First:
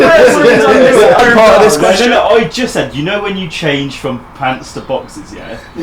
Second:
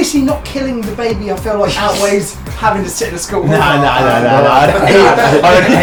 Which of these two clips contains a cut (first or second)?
first